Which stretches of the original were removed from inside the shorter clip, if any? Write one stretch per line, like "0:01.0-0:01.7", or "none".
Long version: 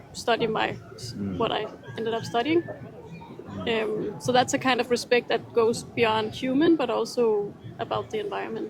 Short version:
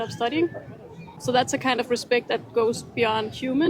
0:03.3-0:04.2